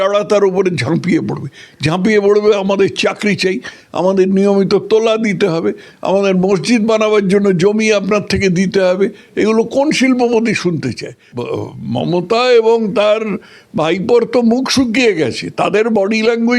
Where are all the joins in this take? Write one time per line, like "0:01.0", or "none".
0:11.3